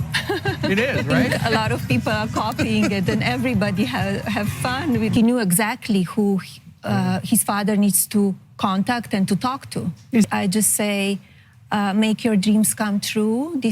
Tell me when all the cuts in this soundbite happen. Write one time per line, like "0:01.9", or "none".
0:01.1
0:05.1
0:10.3